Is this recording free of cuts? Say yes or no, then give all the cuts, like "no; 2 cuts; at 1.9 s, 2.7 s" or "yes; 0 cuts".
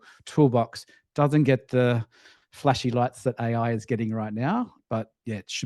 yes; 0 cuts